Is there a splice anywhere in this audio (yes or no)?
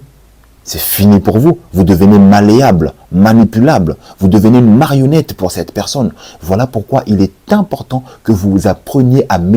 no